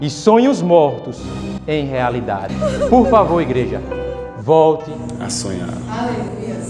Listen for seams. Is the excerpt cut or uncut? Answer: cut